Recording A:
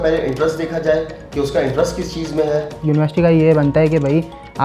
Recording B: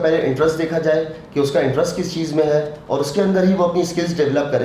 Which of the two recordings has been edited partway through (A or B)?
A